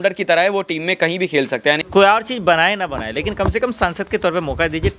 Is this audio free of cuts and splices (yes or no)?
no